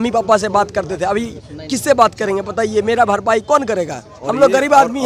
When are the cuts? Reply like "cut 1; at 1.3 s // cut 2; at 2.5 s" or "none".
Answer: none